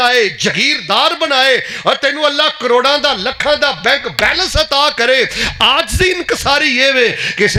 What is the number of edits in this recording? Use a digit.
0